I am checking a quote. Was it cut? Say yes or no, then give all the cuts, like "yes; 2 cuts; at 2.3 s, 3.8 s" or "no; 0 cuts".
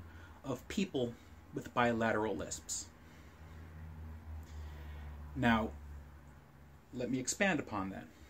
no; 0 cuts